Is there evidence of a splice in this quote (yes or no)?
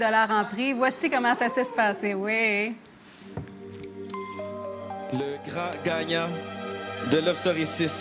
no